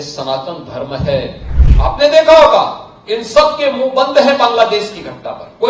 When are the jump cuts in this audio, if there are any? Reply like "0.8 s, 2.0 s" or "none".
1.5 s